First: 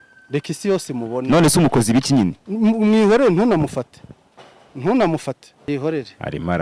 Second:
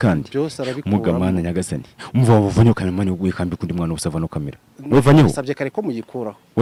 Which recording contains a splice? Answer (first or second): first